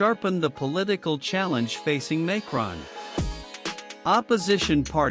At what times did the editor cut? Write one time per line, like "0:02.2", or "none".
0:02.9
0:04.0